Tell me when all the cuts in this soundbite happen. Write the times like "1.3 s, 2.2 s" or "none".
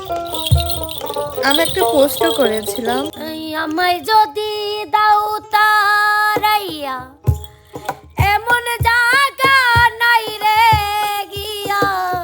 3.1 s

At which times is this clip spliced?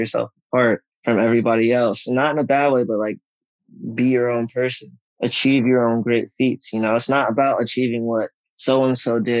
none

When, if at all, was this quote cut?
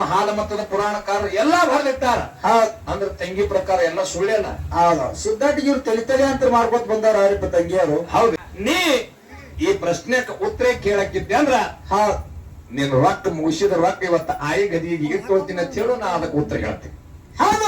8.4 s

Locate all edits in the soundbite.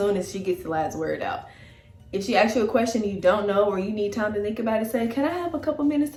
none

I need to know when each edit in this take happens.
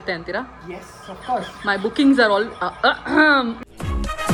none

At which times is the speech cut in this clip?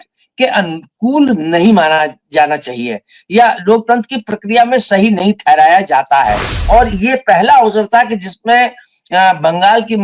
6.5 s

